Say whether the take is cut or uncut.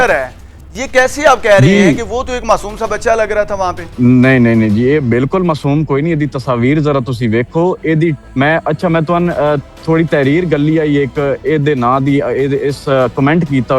cut